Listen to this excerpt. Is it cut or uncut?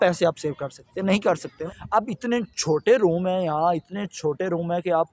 cut